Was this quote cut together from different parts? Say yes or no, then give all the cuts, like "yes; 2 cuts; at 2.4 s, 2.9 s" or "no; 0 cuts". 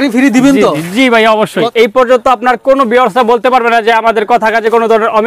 yes; 1 cut; at 1.7 s